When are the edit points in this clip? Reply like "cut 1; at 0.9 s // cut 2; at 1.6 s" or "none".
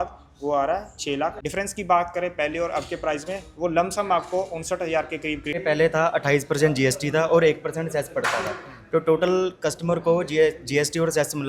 cut 1; at 1.4 s // cut 2; at 5.6 s